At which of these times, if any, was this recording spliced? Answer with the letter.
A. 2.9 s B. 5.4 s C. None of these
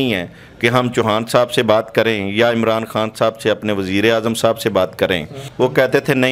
B